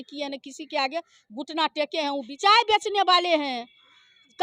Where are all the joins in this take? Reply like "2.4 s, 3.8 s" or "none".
2.3 s